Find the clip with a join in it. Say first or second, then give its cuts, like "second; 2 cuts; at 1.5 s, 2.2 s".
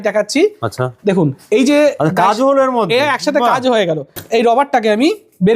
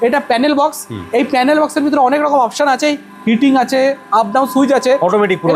first; 1 cut; at 4.1 s